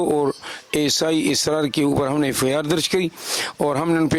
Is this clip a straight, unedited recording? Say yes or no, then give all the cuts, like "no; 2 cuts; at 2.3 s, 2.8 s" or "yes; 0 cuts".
yes; 0 cuts